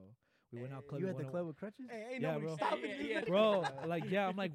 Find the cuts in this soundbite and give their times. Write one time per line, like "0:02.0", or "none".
0:03.2